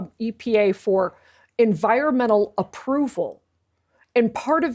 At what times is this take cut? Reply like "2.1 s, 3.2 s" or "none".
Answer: none